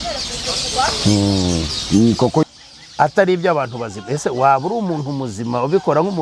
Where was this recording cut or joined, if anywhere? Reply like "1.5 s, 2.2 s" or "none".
2.4 s